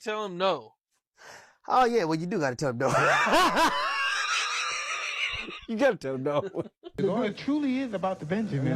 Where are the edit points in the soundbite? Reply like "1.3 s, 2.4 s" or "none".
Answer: 6.8 s